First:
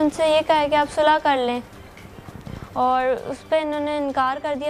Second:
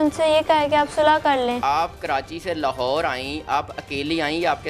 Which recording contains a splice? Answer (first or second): second